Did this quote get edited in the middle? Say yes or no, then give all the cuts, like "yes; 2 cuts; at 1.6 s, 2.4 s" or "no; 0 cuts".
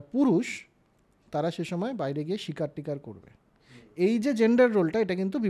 no; 0 cuts